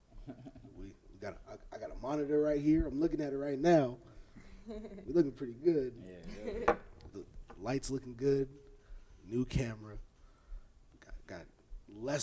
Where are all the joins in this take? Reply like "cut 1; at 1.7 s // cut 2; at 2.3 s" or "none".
cut 1; at 3.7 s